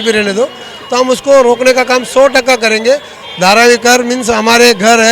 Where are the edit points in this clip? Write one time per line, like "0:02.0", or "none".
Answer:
0:03.2